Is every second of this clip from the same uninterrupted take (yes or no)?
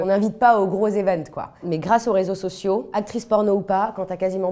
no